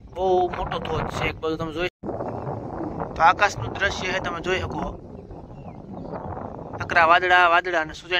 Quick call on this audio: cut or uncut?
cut